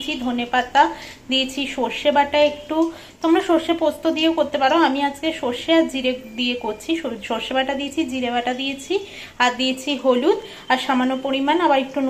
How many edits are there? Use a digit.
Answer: 0